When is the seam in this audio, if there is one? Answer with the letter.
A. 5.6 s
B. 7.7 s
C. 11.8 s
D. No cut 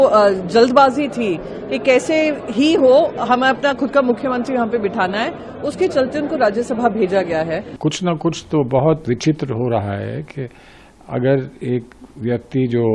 B